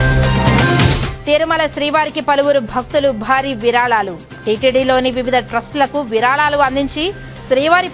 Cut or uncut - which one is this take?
uncut